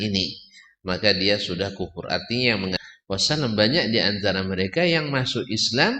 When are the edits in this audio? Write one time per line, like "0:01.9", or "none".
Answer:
0:02.8